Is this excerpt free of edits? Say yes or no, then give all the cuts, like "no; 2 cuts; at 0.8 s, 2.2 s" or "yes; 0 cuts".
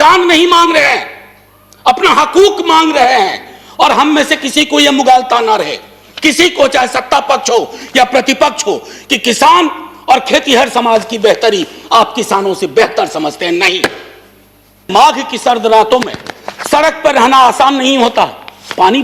no; 1 cut; at 14.9 s